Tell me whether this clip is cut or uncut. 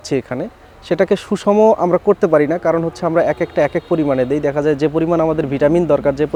uncut